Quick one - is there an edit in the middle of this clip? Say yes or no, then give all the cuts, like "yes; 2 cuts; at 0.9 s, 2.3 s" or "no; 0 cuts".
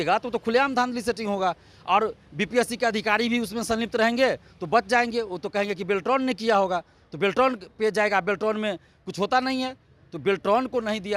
no; 0 cuts